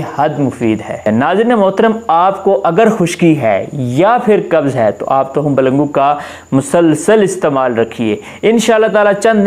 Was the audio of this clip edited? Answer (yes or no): yes